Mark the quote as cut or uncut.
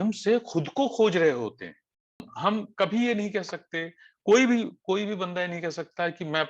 cut